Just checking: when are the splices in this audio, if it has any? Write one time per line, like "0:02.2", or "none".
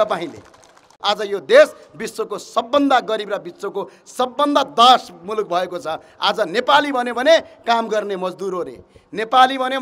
0:00.9